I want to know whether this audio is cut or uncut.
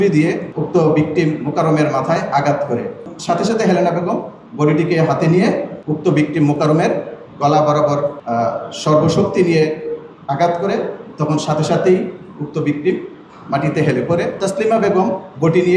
cut